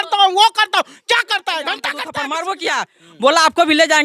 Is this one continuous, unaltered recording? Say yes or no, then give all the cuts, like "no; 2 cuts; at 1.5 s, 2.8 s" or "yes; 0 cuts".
no; 1 cut; at 2.2 s